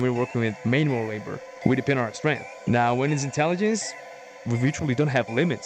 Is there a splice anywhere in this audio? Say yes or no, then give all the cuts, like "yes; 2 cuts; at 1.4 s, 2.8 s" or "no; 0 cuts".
yes; 1 cut; at 2.5 s